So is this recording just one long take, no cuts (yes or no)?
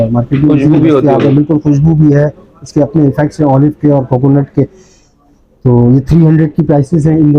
yes